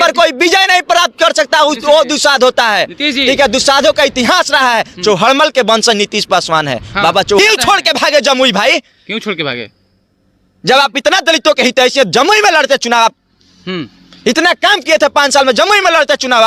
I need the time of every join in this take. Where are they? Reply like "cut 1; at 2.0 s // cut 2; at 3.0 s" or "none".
cut 1; at 7.4 s